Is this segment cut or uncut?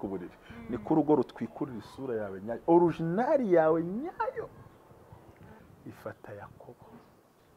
cut